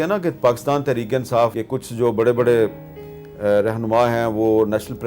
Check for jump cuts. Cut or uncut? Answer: cut